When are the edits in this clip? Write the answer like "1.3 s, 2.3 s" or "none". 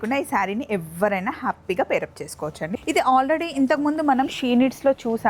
2.7 s